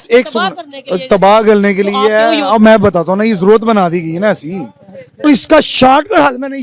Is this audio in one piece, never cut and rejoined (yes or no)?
no